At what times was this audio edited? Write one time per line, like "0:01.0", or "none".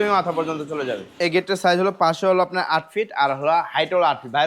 0:01.2